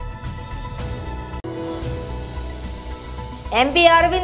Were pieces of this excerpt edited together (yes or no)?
yes